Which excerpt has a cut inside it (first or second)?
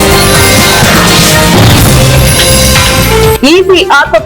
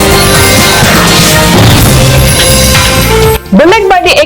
first